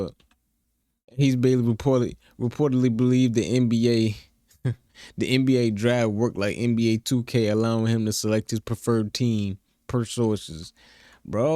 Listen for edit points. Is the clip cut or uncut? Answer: uncut